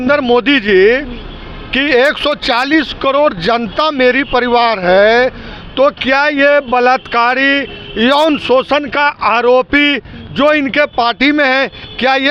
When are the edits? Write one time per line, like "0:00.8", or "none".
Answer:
none